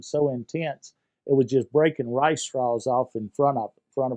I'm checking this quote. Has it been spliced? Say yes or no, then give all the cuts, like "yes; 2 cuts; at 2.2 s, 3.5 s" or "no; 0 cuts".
no; 0 cuts